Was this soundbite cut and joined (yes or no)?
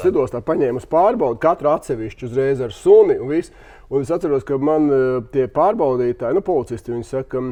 no